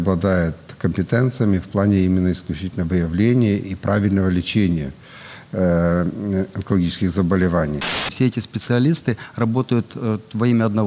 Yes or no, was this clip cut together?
yes